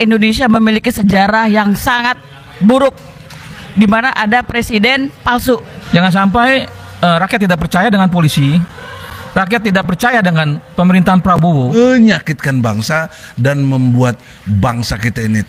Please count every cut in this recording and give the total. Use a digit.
2